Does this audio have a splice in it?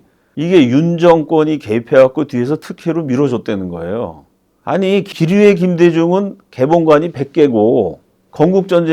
yes; 1 cut; at 5.1 s

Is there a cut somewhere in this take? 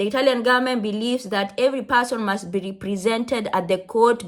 no; 0 cuts

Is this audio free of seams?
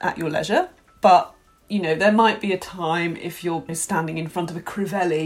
no; 1 cut; at 3.7 s

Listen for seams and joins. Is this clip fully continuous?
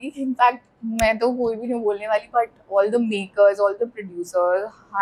yes; 0 cuts

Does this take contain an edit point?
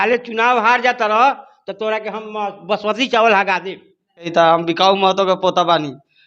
yes; 1 cut; at 4.3 s

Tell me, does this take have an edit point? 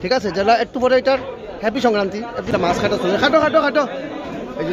yes; 1 cut; at 2.5 s

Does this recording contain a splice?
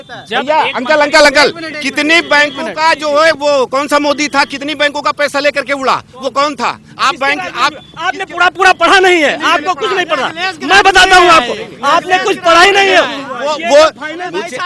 no; 0 cuts

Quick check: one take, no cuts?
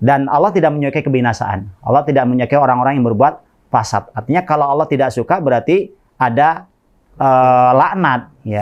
yes; 0 cuts

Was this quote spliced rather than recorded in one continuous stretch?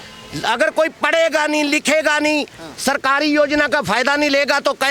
no; 0 cuts

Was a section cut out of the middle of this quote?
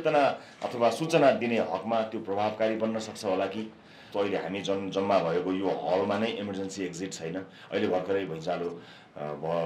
yes; 1 cut; at 4.0 s

